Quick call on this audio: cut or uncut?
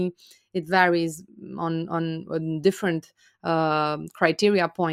uncut